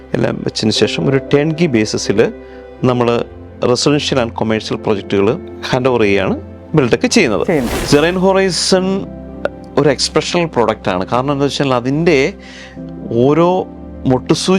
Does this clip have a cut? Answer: yes; 2 cuts; at 5.5 s, 7.7 s

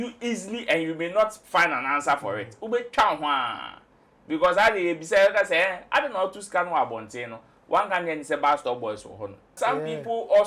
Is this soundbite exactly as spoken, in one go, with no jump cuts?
no; 1 cut; at 9.5 s

